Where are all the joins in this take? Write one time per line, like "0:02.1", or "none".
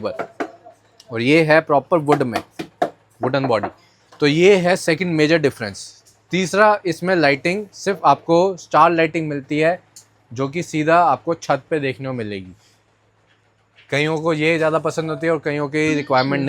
none